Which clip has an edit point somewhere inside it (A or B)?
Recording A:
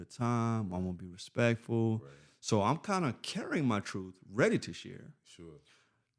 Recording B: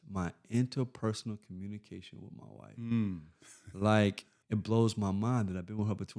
B